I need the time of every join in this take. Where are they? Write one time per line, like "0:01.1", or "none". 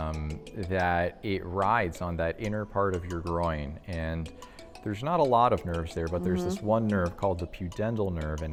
none